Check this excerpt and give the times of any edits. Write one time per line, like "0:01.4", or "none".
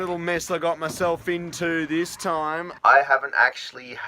0:02.3